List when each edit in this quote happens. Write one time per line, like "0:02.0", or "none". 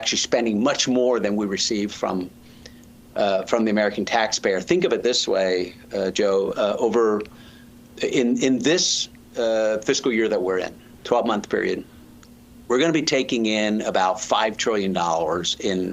none